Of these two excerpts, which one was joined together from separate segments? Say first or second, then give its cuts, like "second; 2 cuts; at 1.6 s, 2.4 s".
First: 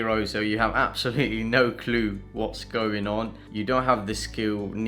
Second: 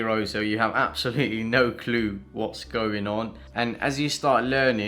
second; 1 cut; at 3.4 s